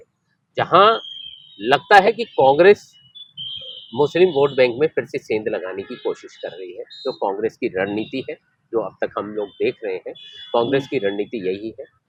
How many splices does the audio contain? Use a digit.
0